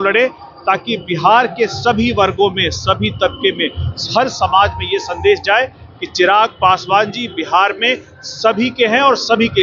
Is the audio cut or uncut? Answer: uncut